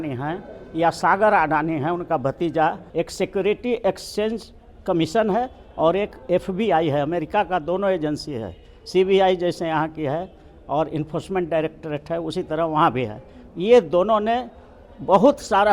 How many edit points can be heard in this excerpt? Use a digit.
1